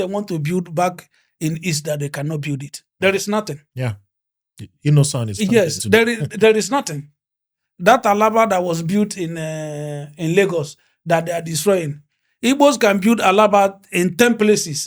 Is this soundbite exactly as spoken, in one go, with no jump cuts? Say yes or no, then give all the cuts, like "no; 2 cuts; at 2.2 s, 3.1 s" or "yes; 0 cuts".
yes; 0 cuts